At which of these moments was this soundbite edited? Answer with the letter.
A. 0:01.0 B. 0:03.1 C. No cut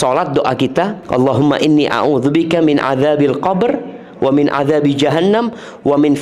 A